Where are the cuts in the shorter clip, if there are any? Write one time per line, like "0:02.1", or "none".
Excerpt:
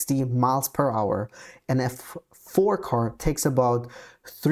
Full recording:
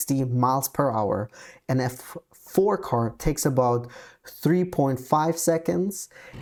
none